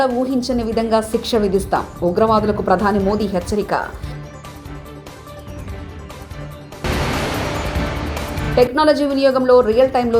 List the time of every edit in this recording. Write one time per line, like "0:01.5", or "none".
none